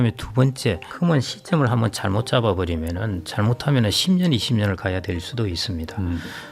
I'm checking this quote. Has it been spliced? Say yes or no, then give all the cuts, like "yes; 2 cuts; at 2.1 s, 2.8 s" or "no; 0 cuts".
yes; 1 cut; at 0.9 s